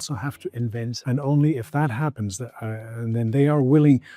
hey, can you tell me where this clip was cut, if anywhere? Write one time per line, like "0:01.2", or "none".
0:01.0